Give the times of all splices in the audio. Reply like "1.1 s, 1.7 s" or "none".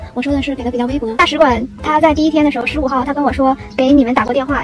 1.1 s

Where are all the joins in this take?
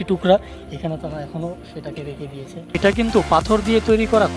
2.8 s

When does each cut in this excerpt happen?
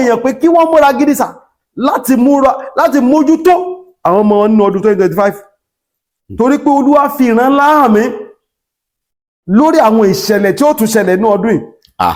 none

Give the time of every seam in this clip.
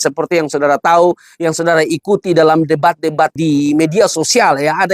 3.4 s

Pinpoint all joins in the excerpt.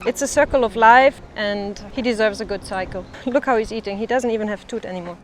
1.6 s, 3.1 s

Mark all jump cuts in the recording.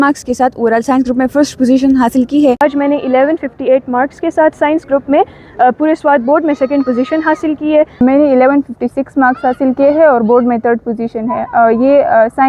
2.6 s, 8.0 s

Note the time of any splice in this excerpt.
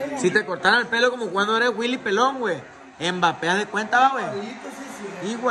none

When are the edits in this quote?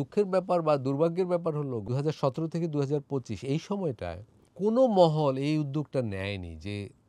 1.8 s

